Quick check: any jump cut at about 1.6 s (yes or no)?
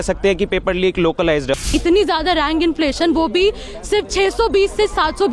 yes